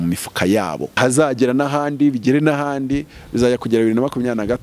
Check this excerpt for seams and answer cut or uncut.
cut